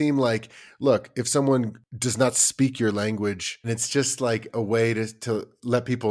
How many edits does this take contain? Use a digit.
2